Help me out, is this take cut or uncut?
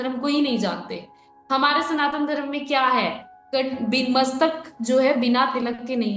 uncut